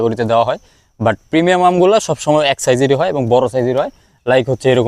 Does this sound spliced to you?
no; 0 cuts

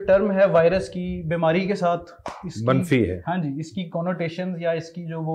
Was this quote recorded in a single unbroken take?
yes; 0 cuts

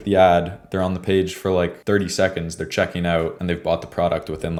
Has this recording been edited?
no; 0 cuts

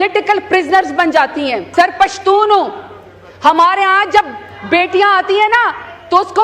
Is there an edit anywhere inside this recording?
yes; 1 cut; at 1.6 s

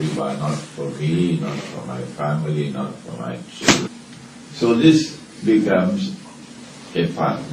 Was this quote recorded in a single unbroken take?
yes; 0 cuts

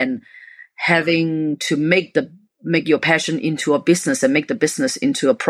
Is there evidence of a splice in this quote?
no; 0 cuts

